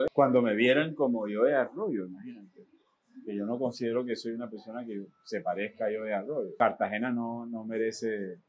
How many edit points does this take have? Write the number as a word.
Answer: one